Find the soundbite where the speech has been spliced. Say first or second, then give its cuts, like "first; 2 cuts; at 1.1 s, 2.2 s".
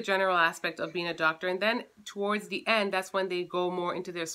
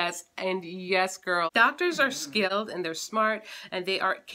second; 2 cuts; at 1.5 s, 2.6 s